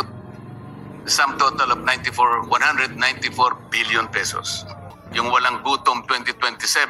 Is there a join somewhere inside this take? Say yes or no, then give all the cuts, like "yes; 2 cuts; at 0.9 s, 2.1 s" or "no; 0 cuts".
yes; 1 cut; at 5.0 s